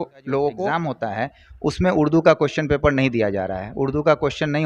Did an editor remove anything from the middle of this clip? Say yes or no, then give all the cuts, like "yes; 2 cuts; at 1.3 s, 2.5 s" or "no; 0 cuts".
yes; 1 cut; at 0.9 s